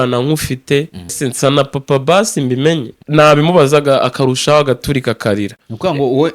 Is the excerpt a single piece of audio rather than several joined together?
no; 2 cuts; at 1.2 s, 3.0 s

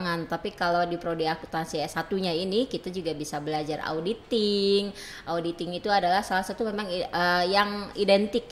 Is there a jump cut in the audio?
no; 0 cuts

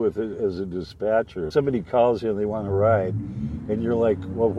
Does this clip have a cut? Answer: yes; 1 cut; at 1.5 s

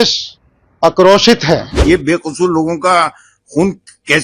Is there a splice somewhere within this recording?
yes; 1 cut; at 1.7 s

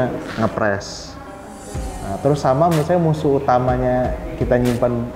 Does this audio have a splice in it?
no; 0 cuts

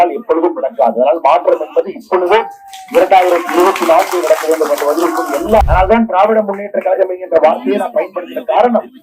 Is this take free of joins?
no; 1 cut; at 5.6 s

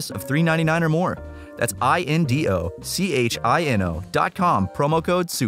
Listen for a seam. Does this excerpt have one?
no; 0 cuts

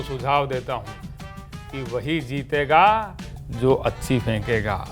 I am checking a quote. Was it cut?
no; 0 cuts

